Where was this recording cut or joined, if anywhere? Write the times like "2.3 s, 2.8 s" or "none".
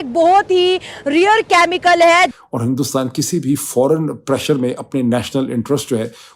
2.4 s

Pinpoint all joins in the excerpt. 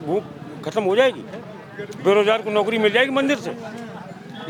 none

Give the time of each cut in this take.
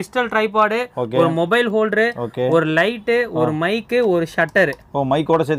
none

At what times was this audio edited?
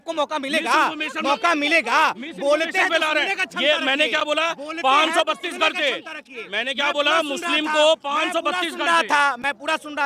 none

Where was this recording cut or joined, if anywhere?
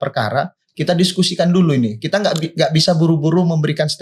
none

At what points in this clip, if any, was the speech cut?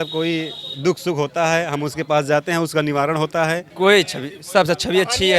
3.7 s

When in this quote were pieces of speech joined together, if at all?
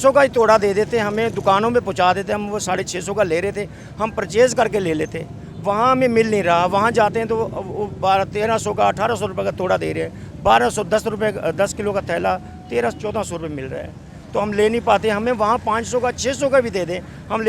none

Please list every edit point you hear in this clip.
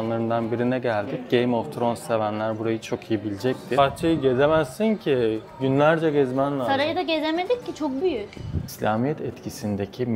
3.8 s, 8.7 s

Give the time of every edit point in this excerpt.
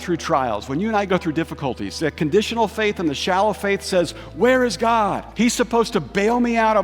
5.2 s

